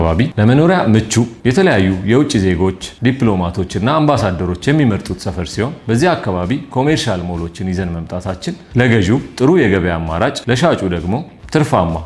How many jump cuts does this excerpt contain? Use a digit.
4